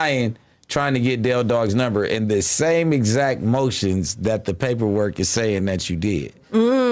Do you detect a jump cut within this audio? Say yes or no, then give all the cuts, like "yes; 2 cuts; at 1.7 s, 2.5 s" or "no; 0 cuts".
no; 0 cuts